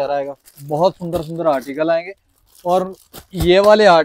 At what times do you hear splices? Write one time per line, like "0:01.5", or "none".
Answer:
none